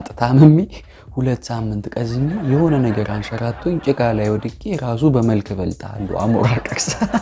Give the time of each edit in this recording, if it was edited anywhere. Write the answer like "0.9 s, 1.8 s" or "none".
none